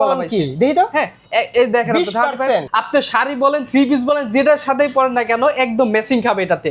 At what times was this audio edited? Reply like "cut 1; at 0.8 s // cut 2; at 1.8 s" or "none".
cut 1; at 2.7 s